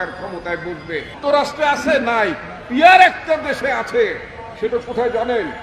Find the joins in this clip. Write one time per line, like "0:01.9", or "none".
0:01.2

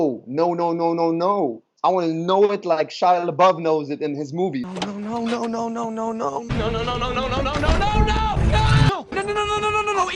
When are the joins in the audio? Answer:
0:08.9

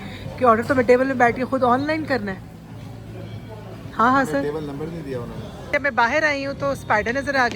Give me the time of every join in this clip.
0:05.6

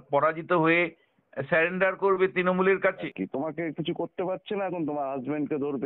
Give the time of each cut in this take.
0:03.0

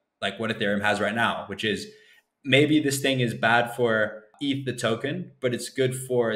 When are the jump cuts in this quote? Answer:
0:04.3

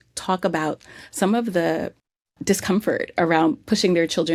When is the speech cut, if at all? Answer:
none

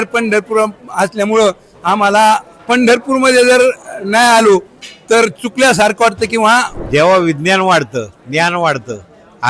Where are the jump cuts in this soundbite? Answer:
0:06.8

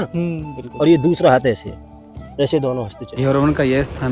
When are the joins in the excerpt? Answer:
0:03.0

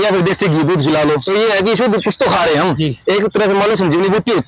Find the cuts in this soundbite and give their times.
0:01.2
0:02.8

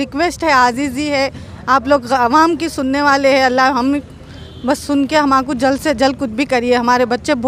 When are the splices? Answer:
none

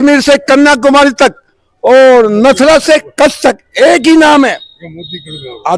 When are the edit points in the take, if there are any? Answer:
none

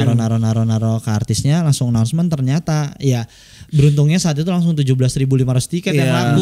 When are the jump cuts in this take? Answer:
none

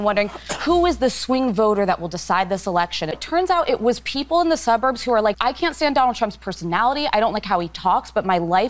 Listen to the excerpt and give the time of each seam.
0:03.2
0:05.4

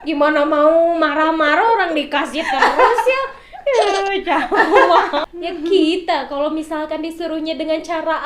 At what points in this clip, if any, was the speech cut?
0:05.3

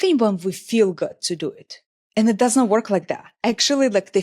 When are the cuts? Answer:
0:03.3

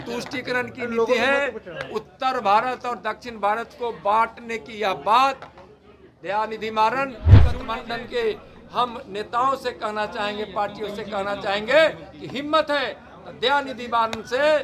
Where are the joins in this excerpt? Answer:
0:07.5

